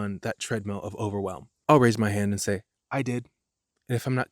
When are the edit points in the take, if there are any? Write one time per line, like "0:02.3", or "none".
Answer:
0:01.5